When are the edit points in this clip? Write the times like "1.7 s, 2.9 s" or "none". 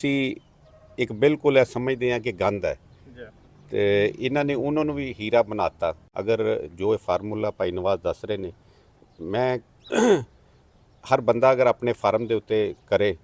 6.1 s